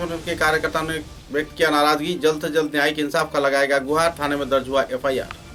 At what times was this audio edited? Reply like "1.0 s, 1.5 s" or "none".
none